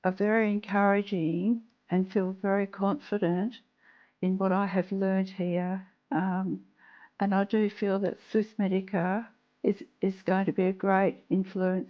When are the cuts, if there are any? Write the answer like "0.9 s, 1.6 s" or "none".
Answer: none